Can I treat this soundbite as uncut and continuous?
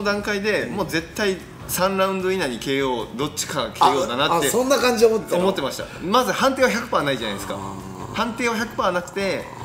yes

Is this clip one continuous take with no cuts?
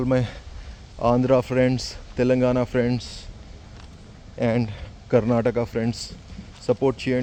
yes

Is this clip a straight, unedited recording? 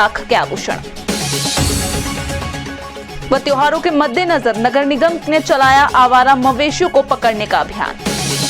yes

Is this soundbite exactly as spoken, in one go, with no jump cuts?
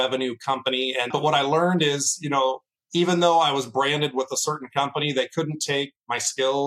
no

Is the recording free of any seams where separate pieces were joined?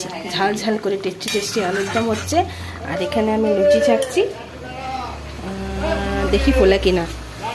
yes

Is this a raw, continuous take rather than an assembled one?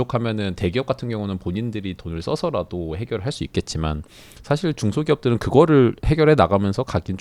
yes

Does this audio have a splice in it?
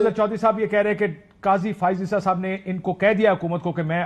no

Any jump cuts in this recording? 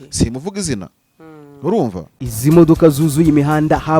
yes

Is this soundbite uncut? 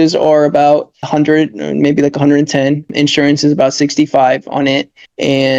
yes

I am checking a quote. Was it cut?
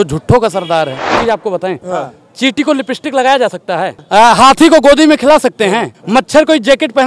yes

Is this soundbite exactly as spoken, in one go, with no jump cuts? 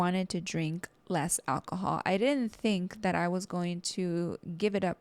yes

